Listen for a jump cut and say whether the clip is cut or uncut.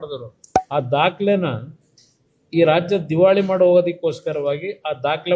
uncut